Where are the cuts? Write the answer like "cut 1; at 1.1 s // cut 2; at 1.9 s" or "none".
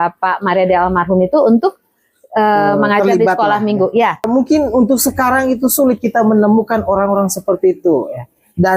cut 1; at 4.2 s